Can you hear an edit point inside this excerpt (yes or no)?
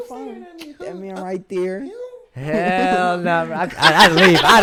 no